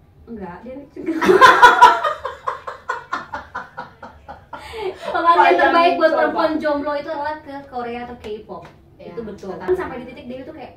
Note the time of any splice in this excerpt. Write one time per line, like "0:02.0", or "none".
0:09.7